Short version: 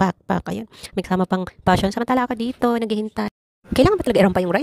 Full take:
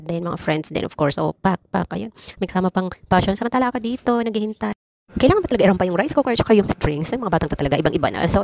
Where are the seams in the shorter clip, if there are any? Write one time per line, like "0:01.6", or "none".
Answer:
none